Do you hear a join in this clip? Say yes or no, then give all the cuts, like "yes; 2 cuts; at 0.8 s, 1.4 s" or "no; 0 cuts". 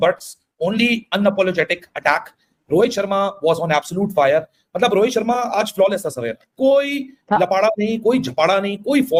no; 0 cuts